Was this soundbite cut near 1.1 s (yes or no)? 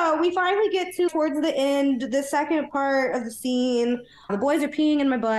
yes